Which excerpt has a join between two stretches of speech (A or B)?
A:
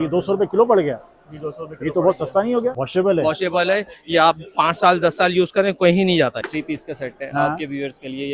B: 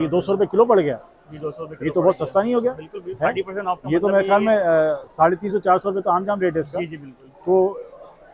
A